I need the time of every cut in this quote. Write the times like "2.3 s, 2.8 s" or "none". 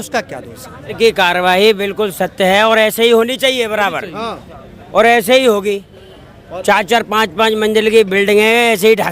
0.9 s